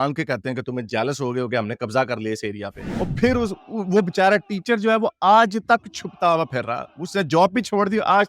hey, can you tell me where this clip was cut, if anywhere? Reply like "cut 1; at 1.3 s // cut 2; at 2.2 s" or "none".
cut 1; at 2.9 s